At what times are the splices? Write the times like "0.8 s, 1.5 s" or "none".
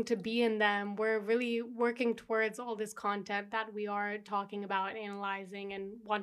none